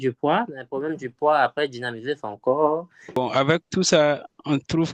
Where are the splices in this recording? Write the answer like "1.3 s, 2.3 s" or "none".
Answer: 3.0 s